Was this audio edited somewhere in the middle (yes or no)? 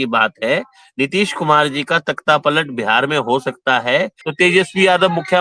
yes